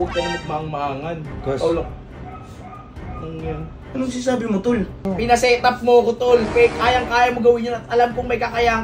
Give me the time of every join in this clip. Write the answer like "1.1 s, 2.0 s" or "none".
1.3 s, 5.0 s